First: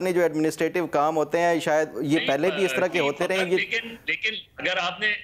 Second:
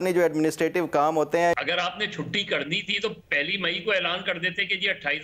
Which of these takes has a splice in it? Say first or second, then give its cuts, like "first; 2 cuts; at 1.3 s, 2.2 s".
second; 1 cut; at 1.5 s